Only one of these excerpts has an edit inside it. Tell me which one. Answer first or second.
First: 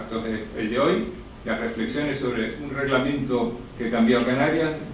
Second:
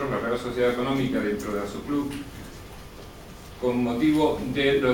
first